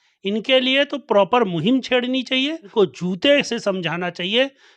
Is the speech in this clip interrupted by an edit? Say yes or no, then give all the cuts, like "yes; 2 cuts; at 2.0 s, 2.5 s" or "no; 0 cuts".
yes; 1 cut; at 2.7 s